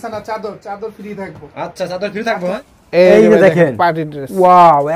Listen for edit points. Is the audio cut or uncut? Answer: cut